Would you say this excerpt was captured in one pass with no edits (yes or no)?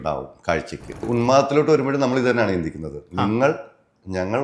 no